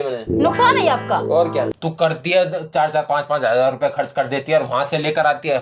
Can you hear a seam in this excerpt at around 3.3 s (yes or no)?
no